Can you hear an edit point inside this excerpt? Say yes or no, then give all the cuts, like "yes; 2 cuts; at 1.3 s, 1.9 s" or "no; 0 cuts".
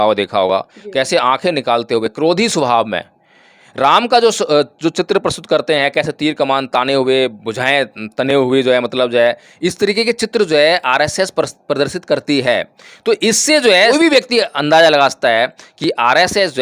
yes; 1 cut; at 13.9 s